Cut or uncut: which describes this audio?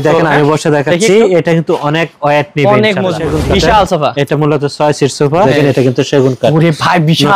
cut